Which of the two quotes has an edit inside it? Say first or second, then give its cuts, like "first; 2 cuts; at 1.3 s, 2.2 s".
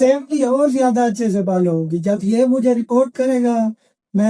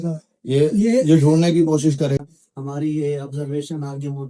second; 1 cut; at 2.2 s